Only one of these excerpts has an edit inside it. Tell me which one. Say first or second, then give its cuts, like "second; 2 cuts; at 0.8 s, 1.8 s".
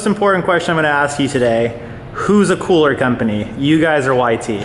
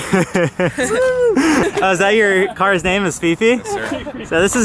second; 1 cut; at 1.7 s